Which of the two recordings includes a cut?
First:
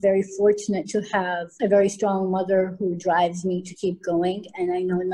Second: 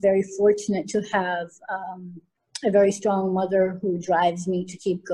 first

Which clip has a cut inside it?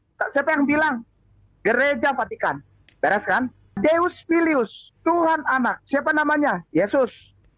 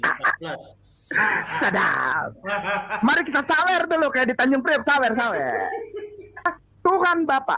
second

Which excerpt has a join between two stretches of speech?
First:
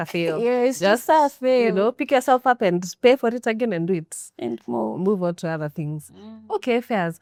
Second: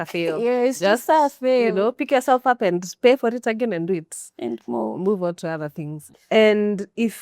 second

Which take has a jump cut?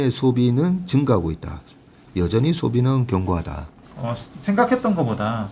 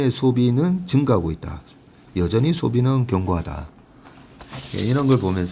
first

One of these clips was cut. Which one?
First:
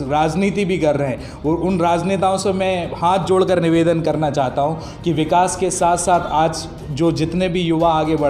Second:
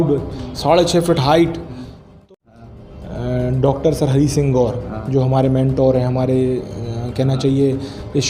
second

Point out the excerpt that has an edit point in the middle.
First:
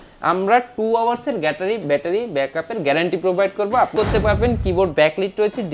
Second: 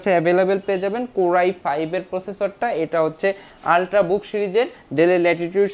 first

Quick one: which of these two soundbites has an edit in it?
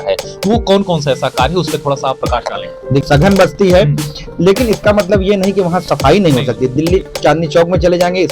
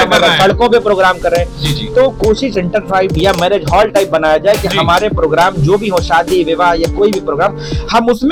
first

